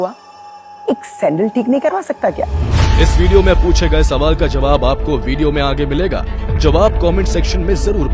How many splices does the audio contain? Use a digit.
1